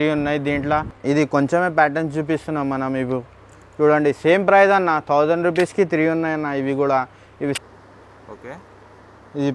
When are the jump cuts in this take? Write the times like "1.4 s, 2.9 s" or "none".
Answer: 0.9 s, 7.6 s